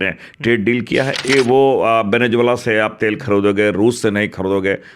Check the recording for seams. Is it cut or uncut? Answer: cut